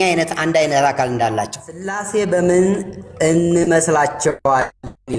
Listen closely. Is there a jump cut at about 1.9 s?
yes; 1 cut; at 1.9 s

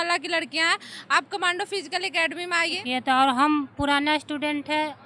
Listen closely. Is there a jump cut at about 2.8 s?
yes; 1 cut; at 2.8 s

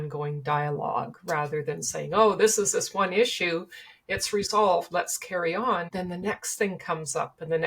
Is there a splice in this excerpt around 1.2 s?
no; 1 cut; at 5.9 s

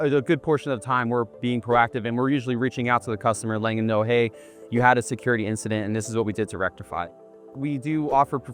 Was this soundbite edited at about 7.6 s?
yes; 1 cut; at 7.6 s

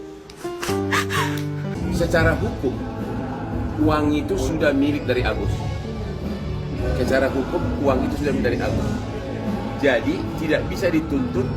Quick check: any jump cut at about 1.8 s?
yes; 1 cut; at 1.8 s

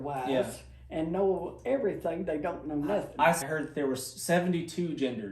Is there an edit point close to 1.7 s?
no; 1 cut; at 3.4 s

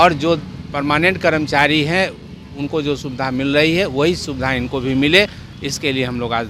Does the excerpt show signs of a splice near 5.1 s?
no; 0 cuts

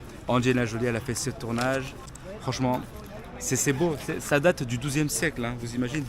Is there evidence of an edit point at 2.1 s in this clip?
yes; 1 cut; at 2.1 s

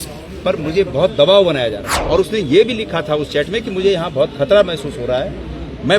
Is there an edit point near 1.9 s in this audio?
yes; 1 cut; at 1.9 s

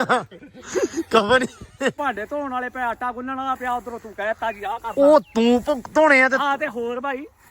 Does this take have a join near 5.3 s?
no; 1 cut; at 2.0 s

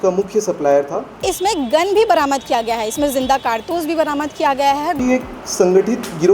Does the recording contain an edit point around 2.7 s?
no; 2 cuts; at 1.2 s, 5.0 s

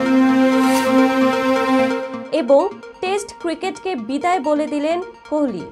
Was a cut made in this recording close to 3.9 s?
no; 1 cut; at 2.1 s

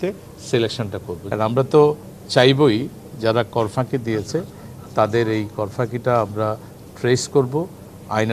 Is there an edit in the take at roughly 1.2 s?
yes; 1 cut; at 1.2 s

